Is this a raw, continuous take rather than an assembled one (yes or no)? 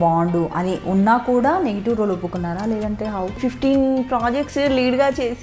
no